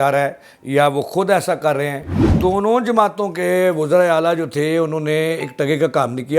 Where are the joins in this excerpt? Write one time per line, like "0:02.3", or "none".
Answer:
0:02.3